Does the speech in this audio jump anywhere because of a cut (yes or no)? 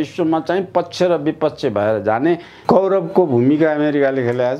yes